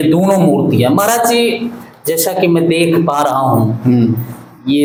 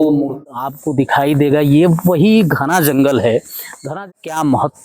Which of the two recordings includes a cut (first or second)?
second